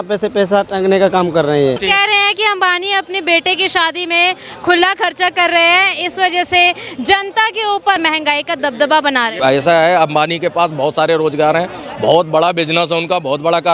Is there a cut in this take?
yes; 3 cuts; at 1.8 s, 8.0 s, 9.3 s

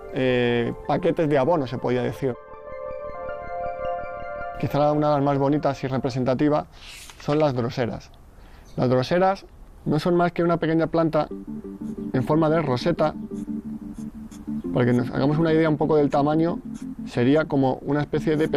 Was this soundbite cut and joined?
no; 0 cuts

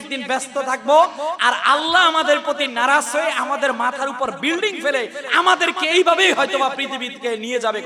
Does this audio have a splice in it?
no; 0 cuts

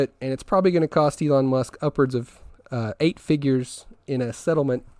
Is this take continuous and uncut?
yes; 0 cuts

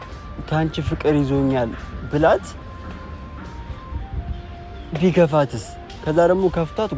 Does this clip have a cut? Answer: no; 0 cuts

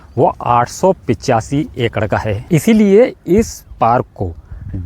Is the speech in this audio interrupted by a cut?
yes; 1 cut; at 2.3 s

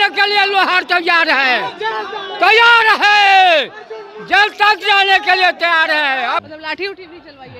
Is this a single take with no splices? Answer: no; 1 cut; at 6.5 s

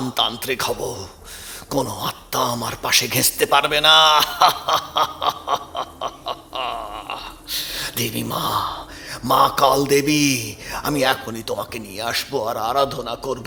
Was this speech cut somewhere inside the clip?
no; 0 cuts

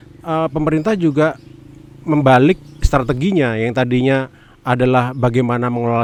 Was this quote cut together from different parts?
no; 0 cuts

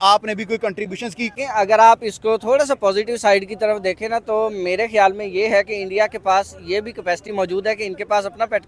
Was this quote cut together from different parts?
yes; 1 cut; at 1.3 s

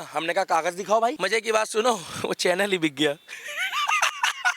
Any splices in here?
yes; 1 cut; at 1.2 s

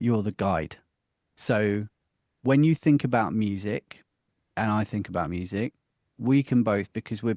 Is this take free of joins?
yes; 0 cuts

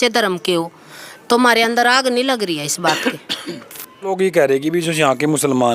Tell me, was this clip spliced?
yes; 1 cut; at 4.1 s

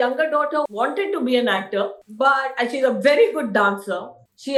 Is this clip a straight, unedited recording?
yes; 0 cuts

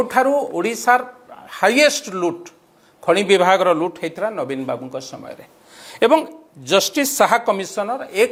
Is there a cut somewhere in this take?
no; 0 cuts

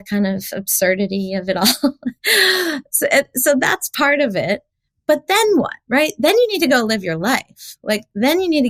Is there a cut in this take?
no; 0 cuts

